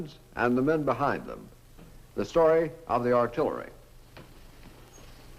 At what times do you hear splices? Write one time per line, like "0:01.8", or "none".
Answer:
0:01.3